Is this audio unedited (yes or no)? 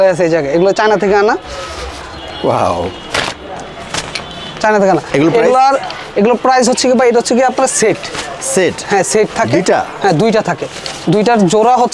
yes